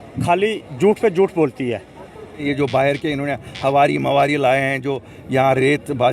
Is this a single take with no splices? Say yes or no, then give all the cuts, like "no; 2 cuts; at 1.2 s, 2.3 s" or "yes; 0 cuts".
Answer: no; 1 cut; at 2.4 s